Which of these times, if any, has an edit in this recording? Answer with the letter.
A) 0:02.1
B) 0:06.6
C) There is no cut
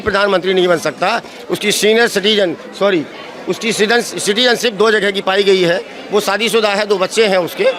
C